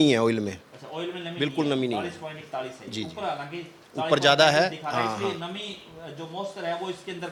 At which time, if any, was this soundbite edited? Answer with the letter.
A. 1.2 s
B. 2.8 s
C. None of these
C